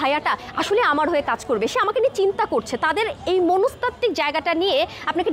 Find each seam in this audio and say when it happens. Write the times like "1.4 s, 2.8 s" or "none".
none